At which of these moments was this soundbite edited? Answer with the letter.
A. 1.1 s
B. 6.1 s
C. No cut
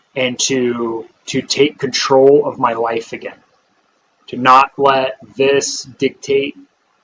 A